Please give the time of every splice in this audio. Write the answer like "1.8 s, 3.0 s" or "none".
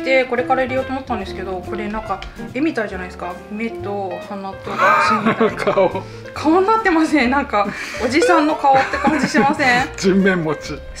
none

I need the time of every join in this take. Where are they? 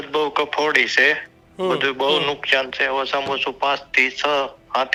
none

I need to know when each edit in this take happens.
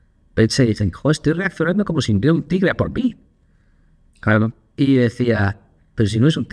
none

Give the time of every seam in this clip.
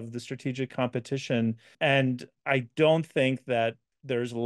1.7 s

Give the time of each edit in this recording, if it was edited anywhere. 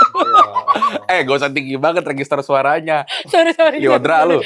none

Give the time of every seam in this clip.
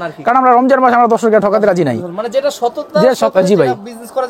none

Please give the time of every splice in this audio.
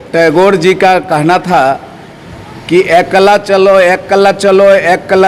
none

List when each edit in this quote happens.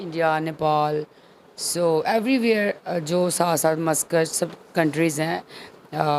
none

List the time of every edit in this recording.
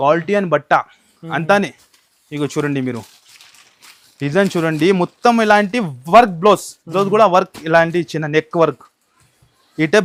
none

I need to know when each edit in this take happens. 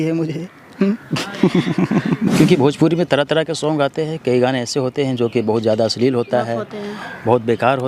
2.3 s

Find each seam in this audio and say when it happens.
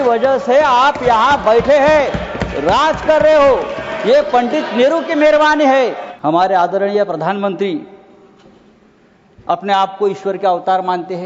6.0 s

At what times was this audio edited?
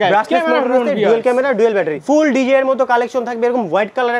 2.0 s

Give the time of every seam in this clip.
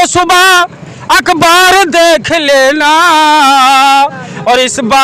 none

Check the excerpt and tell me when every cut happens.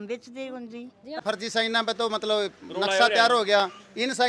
1.2 s

